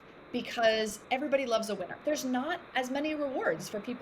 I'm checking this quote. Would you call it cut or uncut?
cut